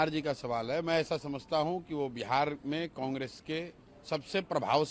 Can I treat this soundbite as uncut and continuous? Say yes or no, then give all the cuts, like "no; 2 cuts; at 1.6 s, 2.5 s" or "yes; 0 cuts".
yes; 0 cuts